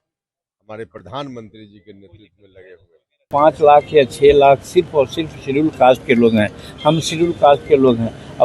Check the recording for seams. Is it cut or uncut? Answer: cut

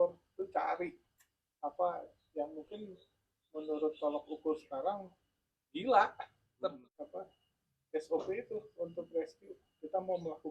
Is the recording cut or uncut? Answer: cut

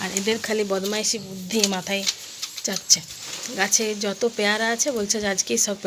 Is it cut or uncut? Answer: uncut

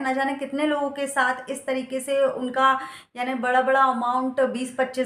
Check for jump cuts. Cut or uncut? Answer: uncut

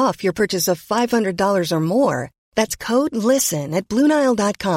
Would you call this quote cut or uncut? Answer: uncut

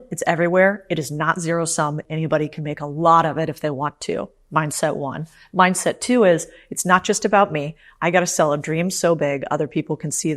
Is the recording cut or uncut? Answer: cut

